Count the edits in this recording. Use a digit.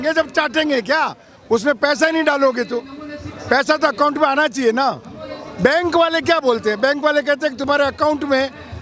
0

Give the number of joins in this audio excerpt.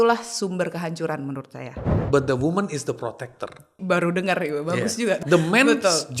3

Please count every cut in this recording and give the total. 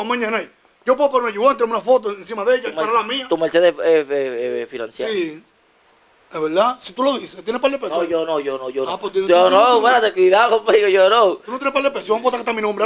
0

